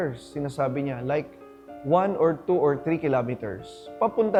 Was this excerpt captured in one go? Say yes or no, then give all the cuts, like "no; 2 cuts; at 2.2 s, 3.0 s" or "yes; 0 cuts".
yes; 0 cuts